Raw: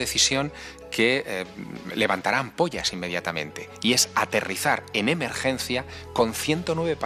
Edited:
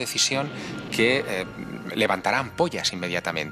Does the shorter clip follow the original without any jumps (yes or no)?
yes